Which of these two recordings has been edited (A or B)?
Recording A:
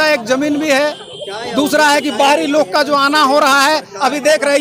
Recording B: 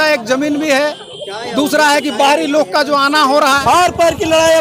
B